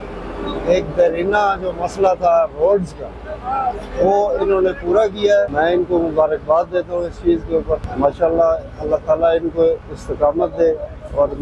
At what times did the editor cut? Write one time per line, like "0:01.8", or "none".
0:05.5
0:07.9